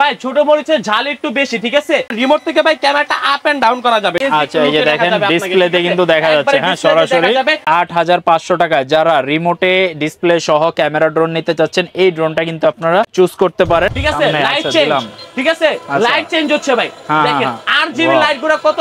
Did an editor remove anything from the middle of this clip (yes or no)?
yes